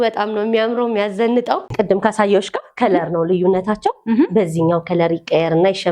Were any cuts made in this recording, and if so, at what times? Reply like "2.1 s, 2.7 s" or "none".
1.7 s